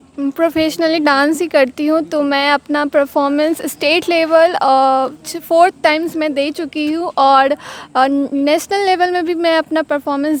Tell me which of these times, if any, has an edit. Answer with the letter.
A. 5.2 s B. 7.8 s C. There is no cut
C